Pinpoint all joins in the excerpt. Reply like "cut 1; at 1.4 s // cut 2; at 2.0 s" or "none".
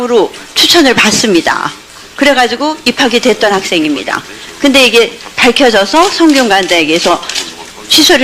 cut 1; at 2.7 s